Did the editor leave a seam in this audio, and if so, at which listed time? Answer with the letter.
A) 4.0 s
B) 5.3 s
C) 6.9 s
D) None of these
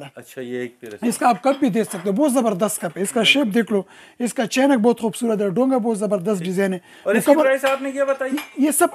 D